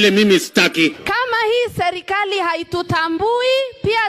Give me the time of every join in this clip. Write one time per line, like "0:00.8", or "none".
0:01.0

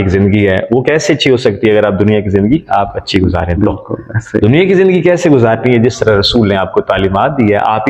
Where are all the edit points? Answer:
none

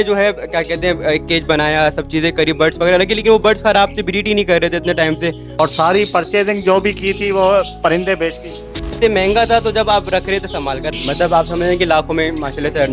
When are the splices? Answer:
0:05.4
0:09.0
0:10.8

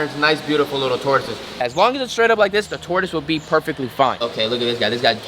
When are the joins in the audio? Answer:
0:01.6
0:04.2

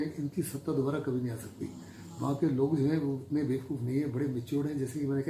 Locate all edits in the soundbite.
none

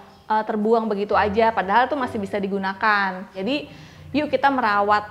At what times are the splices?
0:03.3

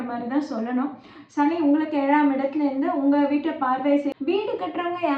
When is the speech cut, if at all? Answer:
0:04.1

